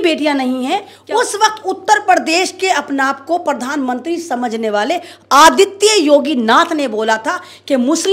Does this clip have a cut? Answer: yes; 1 cut; at 0.9 s

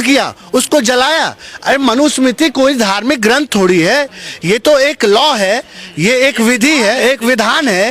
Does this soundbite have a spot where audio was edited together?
no; 0 cuts

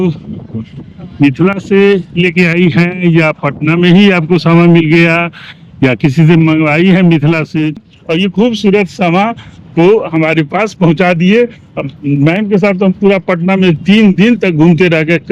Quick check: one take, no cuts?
no; 1 cut; at 7.8 s

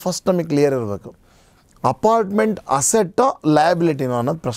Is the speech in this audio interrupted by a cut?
no; 0 cuts

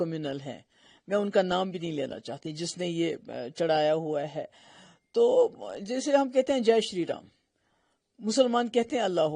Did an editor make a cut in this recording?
no; 0 cuts

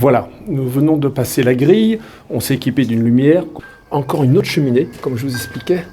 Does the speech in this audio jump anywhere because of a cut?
yes; 1 cut; at 3.5 s

